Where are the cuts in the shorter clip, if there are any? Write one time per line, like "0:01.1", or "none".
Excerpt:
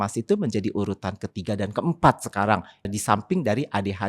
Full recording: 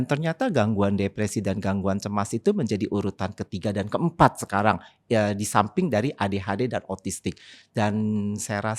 0:02.9